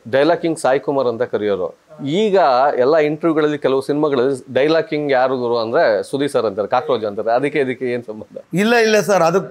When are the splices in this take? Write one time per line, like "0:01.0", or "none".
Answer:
none